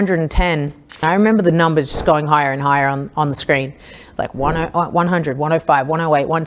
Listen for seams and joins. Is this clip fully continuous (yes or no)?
no